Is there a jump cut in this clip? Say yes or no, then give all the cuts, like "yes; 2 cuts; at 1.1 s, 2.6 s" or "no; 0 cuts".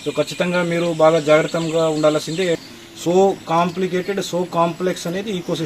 yes; 1 cut; at 2.6 s